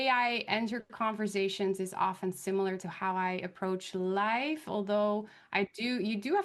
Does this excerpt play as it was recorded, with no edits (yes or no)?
yes